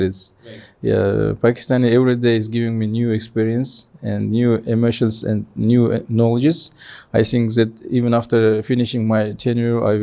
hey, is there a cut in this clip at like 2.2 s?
no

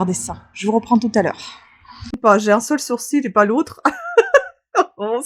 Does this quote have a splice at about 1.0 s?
no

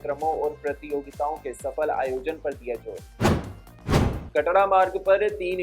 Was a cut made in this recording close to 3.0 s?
yes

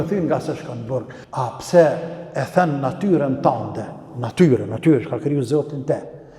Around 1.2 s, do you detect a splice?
yes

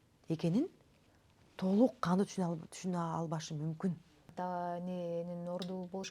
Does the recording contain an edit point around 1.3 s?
no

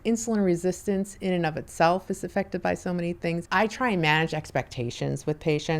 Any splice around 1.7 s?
no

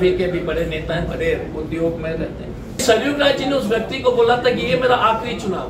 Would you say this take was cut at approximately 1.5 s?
no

